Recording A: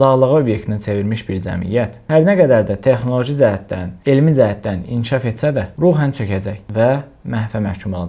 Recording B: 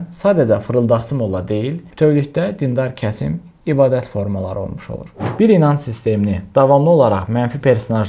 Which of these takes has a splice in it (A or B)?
B